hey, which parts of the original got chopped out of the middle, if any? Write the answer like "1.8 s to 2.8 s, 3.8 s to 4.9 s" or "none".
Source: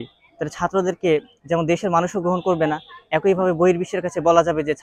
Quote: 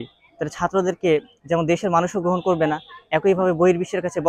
none